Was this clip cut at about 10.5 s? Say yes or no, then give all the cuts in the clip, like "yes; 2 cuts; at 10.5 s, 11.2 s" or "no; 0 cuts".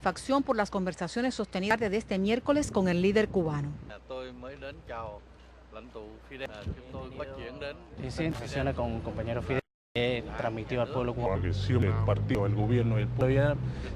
yes; 1 cut; at 10.5 s